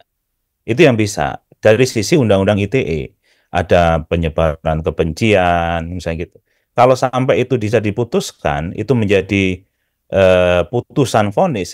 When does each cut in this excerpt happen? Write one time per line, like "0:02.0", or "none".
none